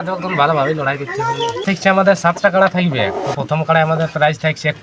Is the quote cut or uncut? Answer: cut